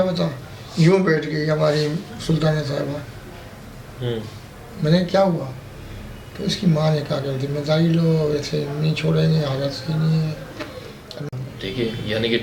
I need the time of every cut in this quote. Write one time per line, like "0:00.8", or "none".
0:11.3